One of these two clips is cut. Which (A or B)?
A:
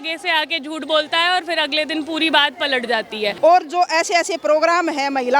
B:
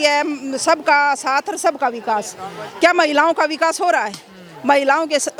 A